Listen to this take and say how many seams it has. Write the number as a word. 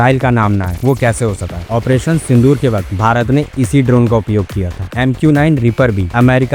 two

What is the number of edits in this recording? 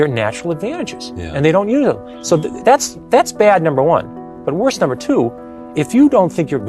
zero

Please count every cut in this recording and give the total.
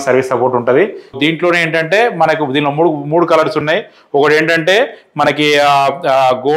one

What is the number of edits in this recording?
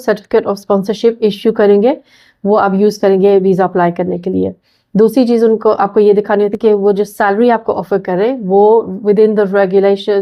zero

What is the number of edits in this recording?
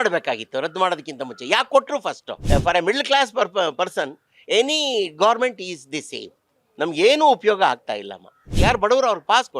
two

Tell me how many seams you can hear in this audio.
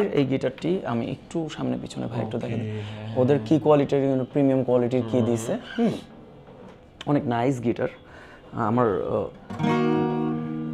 zero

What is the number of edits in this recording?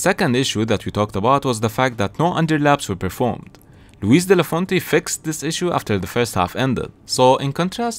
one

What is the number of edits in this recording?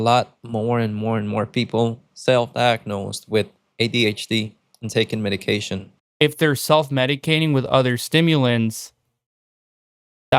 one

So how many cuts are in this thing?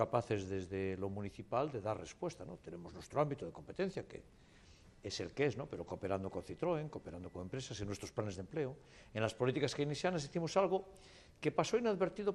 one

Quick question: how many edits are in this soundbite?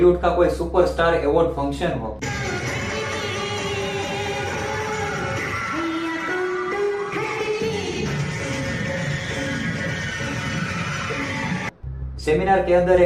zero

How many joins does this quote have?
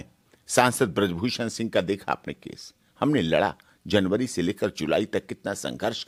zero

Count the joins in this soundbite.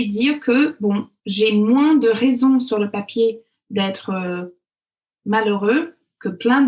one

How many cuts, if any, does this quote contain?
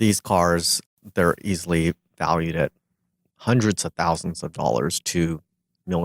one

